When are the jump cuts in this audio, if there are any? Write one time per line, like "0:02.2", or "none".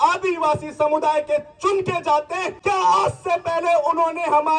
0:02.5